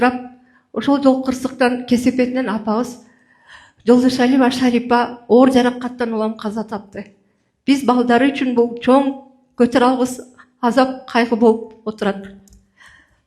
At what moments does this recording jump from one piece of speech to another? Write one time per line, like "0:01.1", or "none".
none